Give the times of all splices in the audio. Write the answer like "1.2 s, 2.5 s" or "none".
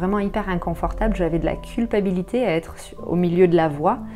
none